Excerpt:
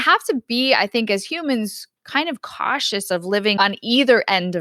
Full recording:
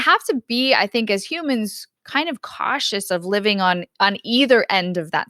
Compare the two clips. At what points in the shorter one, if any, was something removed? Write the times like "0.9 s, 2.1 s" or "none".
3.5 s